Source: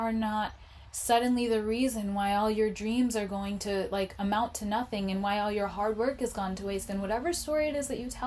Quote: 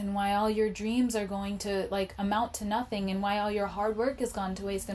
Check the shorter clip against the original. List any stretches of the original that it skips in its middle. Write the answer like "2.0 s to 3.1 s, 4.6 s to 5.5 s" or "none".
none